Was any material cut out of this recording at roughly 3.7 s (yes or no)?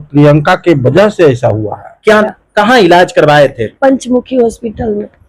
no